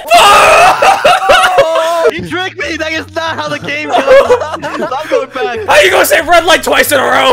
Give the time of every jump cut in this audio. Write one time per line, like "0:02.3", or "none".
none